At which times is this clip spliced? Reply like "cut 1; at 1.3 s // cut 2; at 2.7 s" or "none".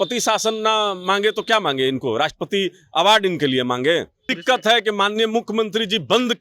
cut 1; at 4.3 s